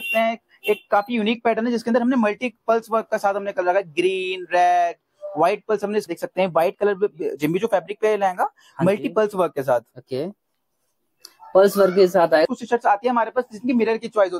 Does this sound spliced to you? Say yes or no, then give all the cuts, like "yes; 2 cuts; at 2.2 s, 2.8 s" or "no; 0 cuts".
yes; 2 cuts; at 6.1 s, 12.4 s